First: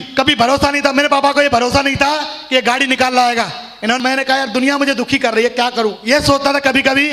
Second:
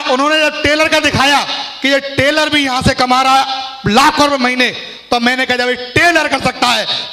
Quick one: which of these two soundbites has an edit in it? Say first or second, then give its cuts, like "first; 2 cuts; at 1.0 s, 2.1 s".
first; 1 cut; at 4.0 s